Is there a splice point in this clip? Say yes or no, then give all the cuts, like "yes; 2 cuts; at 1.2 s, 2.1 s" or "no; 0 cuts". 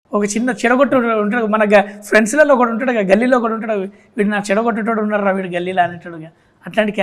no; 0 cuts